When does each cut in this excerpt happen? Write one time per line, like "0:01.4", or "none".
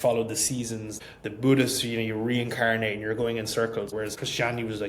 0:01.0
0:04.0